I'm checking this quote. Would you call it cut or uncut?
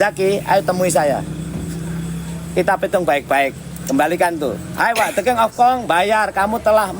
cut